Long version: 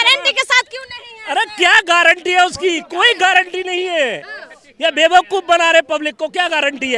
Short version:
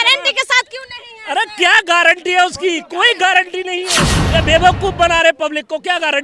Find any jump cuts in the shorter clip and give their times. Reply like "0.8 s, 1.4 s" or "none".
3.9 s